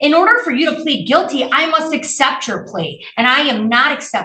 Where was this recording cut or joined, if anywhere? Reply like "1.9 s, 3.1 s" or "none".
none